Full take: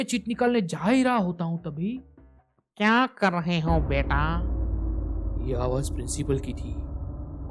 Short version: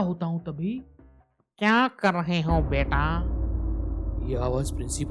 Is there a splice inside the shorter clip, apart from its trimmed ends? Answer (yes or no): no